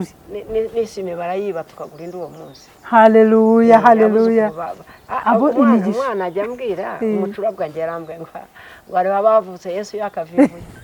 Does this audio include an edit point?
no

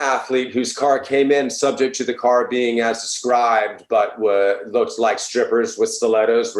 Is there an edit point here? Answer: no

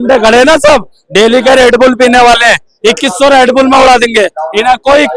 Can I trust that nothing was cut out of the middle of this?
yes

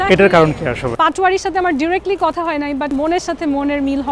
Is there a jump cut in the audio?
yes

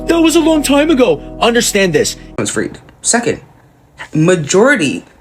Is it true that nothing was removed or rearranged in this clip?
no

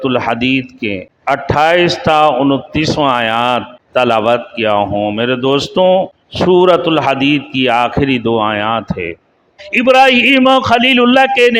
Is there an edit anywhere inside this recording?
yes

